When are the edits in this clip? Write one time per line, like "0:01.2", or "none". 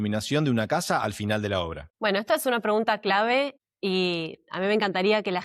0:03.6